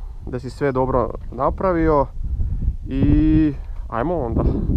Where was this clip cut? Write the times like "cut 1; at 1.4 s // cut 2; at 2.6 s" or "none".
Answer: none